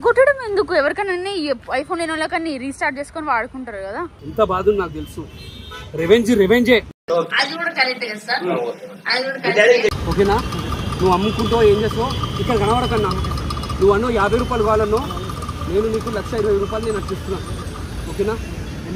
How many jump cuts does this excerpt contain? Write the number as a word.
one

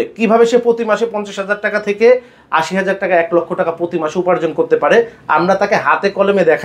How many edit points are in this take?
zero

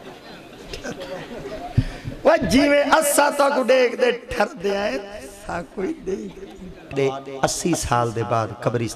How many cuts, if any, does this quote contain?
one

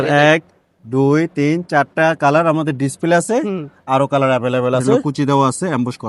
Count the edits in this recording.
one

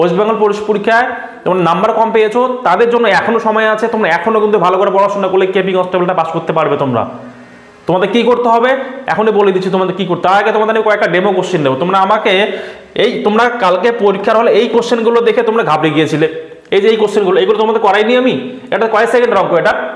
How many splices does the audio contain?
zero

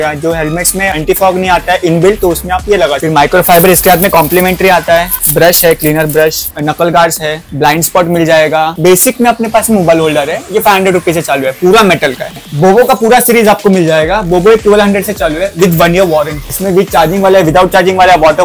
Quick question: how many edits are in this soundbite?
one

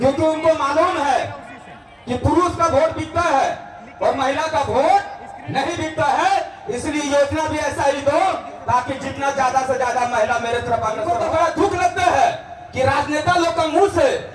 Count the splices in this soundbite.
one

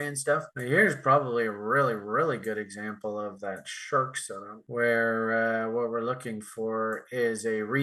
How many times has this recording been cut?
zero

